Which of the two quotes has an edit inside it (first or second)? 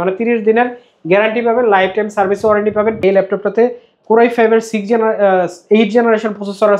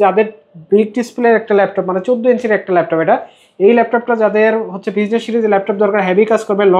first